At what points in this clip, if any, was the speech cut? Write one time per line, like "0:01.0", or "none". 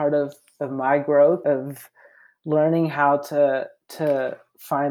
0:01.4